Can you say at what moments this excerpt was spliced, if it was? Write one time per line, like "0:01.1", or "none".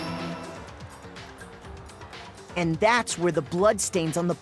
0:00.9
0:02.3